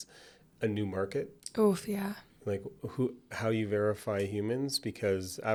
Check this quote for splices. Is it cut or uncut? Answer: uncut